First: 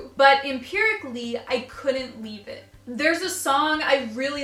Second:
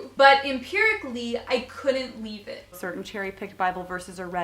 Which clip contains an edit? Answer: second; 1 cut; at 2.8 s

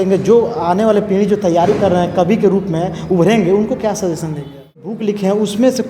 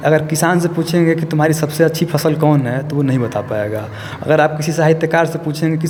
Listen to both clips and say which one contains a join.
first; 1 cut; at 4.9 s

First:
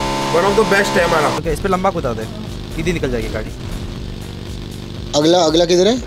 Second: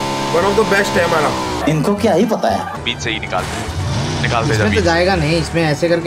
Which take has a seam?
first; 2 cuts; at 1.4 s, 3.6 s

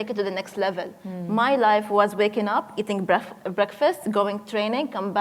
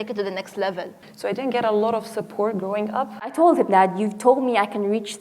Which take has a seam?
second; 2 cuts; at 1.0 s, 3.3 s

